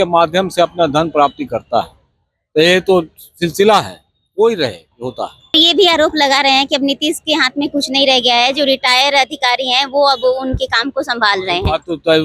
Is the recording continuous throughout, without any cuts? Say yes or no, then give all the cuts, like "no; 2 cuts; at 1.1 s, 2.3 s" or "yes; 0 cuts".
no; 1 cut; at 5.5 s